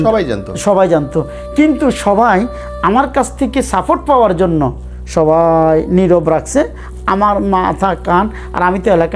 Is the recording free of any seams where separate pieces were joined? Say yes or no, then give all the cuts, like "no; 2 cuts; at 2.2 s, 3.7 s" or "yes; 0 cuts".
yes; 0 cuts